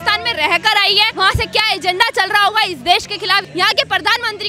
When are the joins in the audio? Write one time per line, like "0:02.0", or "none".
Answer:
0:01.1
0:03.5